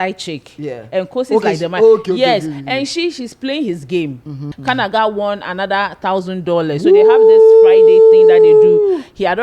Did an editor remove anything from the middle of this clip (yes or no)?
yes